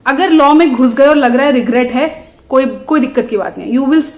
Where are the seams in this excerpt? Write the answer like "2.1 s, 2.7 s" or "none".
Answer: none